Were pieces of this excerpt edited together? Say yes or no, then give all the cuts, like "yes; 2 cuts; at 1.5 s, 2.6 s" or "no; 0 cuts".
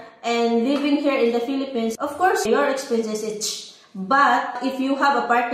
yes; 2 cuts; at 2.2 s, 4.6 s